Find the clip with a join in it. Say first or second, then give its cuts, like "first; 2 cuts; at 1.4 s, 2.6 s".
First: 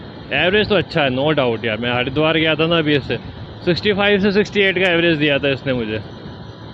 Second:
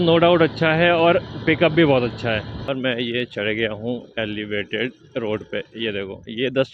second; 1 cut; at 2.7 s